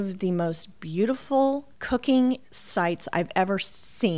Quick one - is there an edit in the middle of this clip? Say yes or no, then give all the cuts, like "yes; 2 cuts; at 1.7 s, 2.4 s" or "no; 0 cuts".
yes; 2 cuts; at 1.7 s, 2.6 s